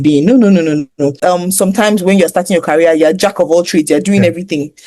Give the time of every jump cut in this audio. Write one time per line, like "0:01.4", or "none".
0:01.2